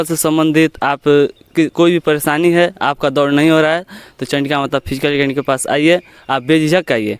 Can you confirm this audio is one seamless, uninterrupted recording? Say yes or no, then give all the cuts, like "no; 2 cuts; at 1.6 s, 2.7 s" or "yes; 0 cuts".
yes; 0 cuts